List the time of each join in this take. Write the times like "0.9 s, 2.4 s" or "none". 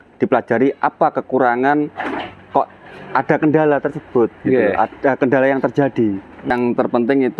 6.5 s

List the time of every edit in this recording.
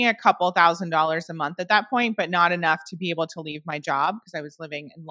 none

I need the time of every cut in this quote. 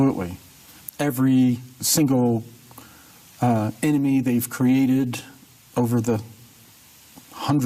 5.9 s

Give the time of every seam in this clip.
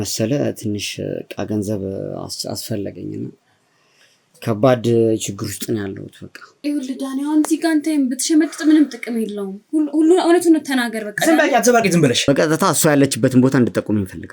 6.6 s, 12.3 s

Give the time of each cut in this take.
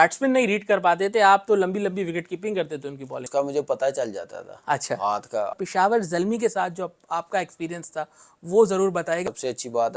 3.2 s, 5.5 s, 9.2 s

